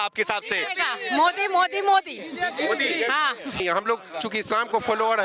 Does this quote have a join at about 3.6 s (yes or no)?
yes